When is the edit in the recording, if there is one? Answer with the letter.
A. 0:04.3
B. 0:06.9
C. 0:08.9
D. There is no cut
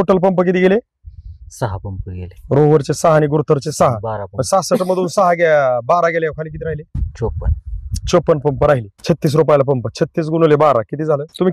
C